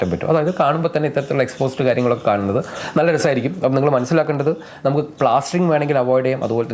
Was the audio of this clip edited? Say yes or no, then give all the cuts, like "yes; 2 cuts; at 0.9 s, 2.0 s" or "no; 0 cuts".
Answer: no; 0 cuts